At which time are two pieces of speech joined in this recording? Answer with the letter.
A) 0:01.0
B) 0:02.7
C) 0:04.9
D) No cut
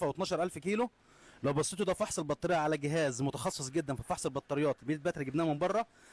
D